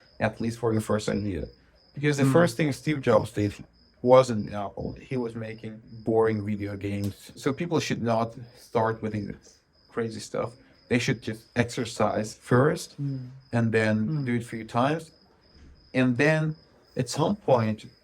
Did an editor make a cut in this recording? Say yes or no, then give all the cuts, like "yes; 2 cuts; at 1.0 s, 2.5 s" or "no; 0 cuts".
yes; 2 cuts; at 5.9 s, 7.3 s